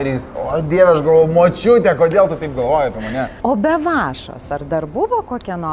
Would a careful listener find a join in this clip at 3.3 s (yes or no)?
yes